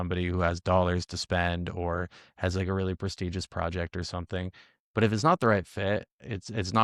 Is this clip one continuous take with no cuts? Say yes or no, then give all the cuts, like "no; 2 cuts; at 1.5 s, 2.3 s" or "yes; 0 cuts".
yes; 0 cuts